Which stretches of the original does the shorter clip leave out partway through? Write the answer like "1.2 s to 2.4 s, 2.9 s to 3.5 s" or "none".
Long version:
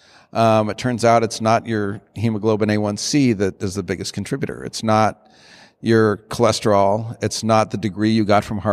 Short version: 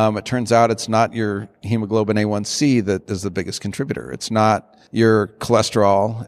5.3 s to 5.7 s